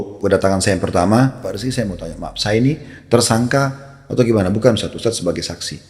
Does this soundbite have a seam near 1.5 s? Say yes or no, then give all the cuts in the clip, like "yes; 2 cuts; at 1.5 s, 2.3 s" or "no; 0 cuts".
yes; 1 cut; at 1.5 s